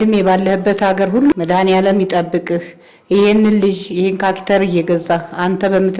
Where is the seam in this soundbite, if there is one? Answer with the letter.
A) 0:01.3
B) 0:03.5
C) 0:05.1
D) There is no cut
A